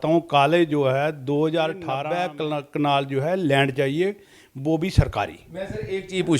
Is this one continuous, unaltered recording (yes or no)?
no